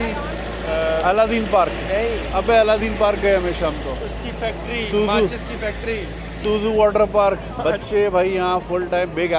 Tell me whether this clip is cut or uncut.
uncut